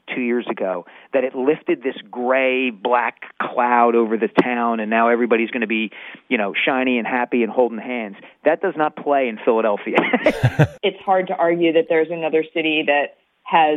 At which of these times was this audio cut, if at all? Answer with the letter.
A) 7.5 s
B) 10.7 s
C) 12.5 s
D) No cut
B